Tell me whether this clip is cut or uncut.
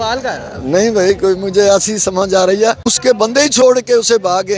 cut